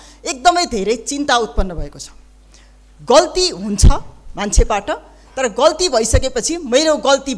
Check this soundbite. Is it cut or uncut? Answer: uncut